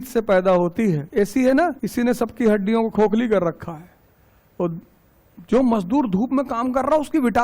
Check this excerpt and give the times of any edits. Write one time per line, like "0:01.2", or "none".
0:01.0
0:01.8